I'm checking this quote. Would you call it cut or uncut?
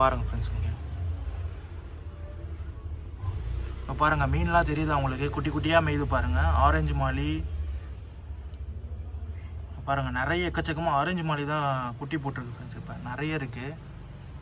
uncut